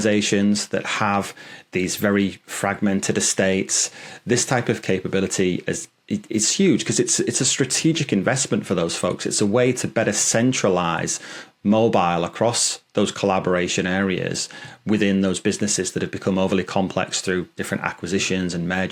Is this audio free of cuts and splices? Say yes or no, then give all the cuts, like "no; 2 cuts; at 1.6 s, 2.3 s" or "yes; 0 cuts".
yes; 0 cuts